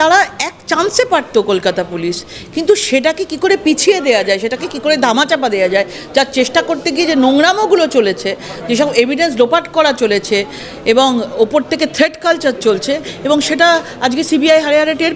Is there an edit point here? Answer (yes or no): no